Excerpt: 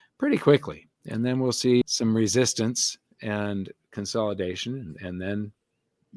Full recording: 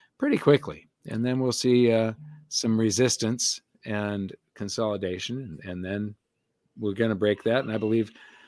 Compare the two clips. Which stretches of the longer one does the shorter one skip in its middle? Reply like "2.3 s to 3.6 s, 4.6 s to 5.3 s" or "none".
1.8 s to 2.4 s